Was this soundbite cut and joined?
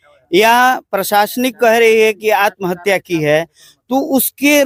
no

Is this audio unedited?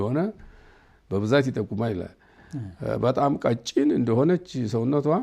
yes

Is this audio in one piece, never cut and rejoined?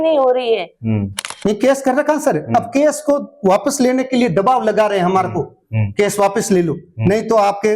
no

